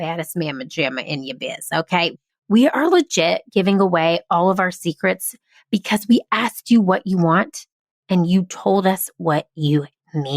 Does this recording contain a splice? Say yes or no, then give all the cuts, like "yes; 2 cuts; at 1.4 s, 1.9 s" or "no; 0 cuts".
yes; 1 cut; at 2.1 s